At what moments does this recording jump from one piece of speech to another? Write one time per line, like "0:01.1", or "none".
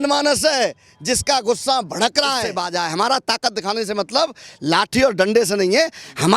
0:02.6